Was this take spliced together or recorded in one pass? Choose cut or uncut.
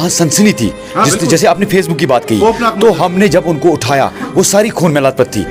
uncut